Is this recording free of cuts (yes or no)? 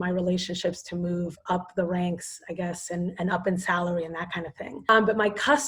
no